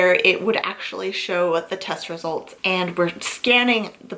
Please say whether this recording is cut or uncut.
cut